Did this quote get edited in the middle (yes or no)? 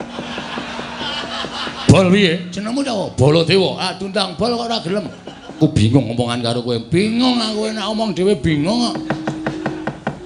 yes